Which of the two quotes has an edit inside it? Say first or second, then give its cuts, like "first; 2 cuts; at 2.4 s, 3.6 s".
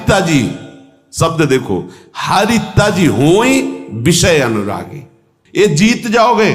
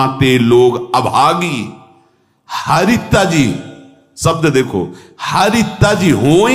first; 1 cut; at 5.6 s